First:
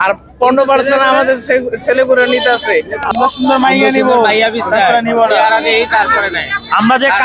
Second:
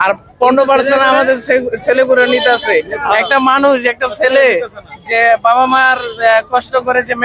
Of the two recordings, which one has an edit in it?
first; 1 cut; at 3.1 s

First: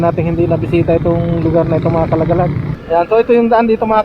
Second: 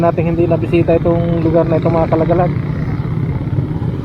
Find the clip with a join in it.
first; 1 cut; at 2.7 s

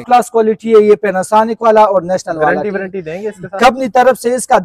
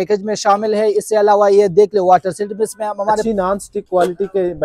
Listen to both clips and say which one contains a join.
second; 1 cut; at 3.2 s

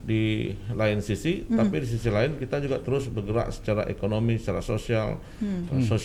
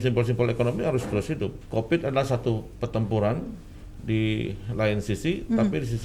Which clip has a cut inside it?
second; 1 cut; at 1.6 s

